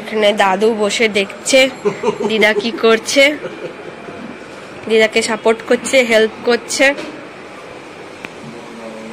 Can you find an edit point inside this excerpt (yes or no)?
no